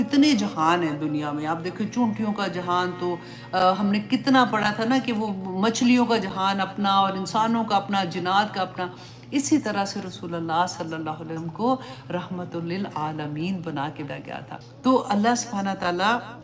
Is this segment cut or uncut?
uncut